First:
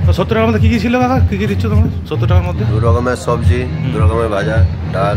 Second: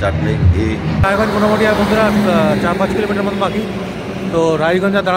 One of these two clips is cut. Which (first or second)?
second